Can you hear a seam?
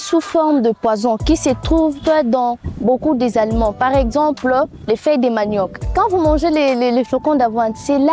yes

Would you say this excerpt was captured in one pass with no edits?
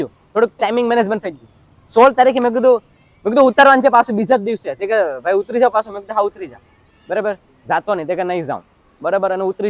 yes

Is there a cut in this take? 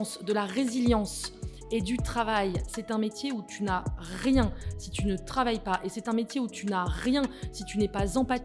no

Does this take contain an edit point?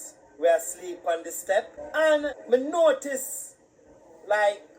yes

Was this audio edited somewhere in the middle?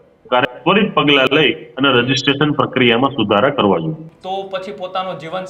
yes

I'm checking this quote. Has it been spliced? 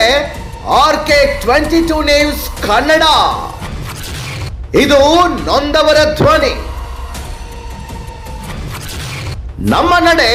no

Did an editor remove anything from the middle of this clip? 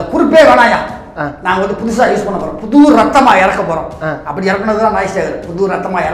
no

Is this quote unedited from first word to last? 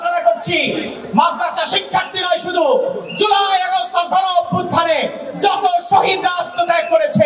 yes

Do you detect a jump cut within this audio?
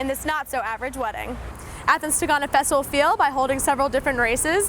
yes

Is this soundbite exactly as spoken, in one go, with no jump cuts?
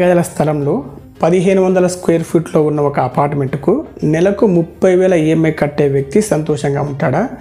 yes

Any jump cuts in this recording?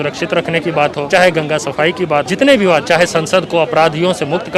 yes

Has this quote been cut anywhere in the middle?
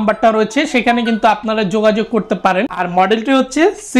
yes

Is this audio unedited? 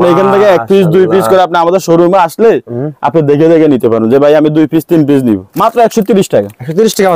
no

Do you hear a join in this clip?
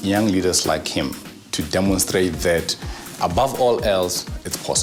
no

